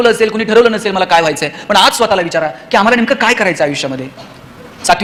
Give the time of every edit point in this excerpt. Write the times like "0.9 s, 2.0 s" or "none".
none

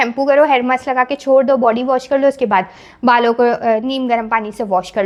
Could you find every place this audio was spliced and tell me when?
none

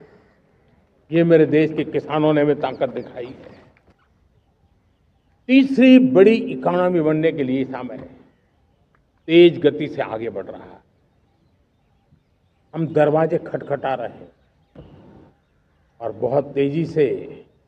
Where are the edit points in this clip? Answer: 3.8 s

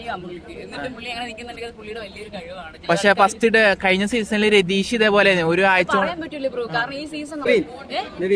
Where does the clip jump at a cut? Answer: 7.5 s

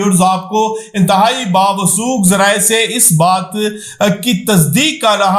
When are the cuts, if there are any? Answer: none

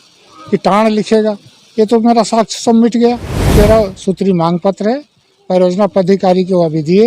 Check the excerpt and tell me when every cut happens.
3.5 s

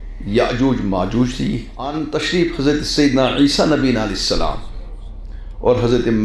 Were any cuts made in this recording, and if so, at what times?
1.9 s

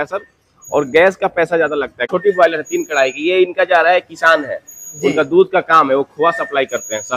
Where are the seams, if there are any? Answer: 2.0 s

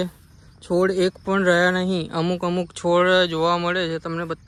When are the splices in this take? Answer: none

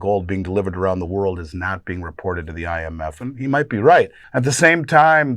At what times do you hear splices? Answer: 4.2 s

